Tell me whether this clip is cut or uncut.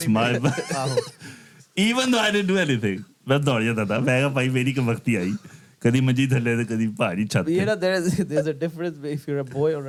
uncut